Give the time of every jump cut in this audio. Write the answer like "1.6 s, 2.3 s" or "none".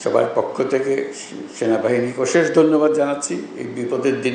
none